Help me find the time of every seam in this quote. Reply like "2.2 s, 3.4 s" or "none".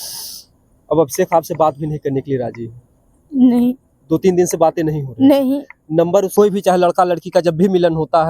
6.3 s